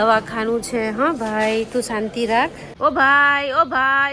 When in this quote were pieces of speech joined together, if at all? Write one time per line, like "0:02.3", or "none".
0:02.6